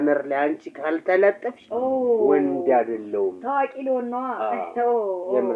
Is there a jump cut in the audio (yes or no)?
no